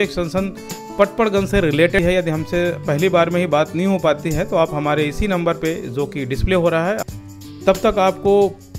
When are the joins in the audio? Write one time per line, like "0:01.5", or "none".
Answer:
0:02.0
0:07.0